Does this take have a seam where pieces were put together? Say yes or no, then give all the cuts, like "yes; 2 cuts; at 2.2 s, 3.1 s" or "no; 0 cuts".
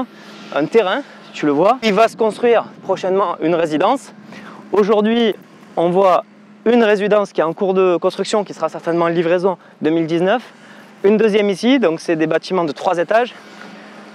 yes; 1 cut; at 1.9 s